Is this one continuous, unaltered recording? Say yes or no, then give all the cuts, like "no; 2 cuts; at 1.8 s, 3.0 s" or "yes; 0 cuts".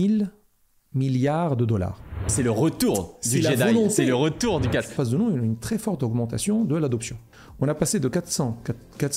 no; 2 cuts; at 2.3 s, 4.9 s